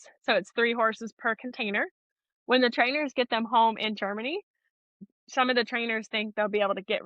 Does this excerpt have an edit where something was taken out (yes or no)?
yes